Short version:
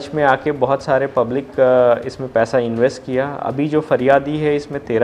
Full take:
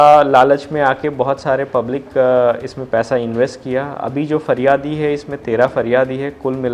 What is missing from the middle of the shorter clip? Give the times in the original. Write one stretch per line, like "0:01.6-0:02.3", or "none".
none